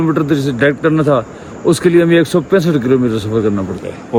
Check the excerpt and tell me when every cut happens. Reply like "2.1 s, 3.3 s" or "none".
none